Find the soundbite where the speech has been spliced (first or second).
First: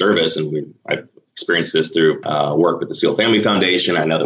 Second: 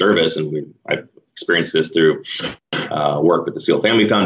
first